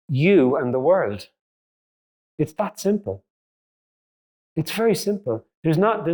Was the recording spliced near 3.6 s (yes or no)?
no